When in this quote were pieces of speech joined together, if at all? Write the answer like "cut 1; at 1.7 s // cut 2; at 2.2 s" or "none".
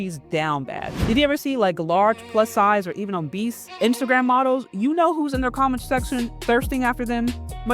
cut 1; at 1.0 s // cut 2; at 3.6 s